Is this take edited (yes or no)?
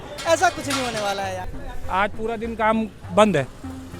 yes